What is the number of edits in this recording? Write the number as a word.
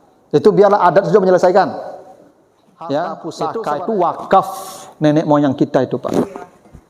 one